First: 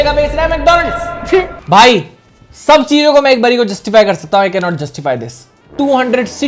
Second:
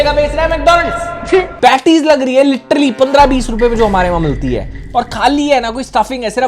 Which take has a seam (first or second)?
second